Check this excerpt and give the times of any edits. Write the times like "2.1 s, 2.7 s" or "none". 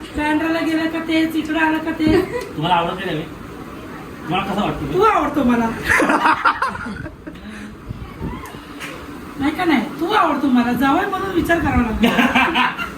none